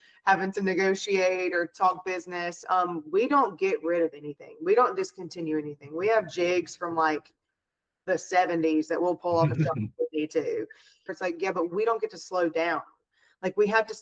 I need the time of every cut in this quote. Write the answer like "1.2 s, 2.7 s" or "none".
2.6 s, 11.1 s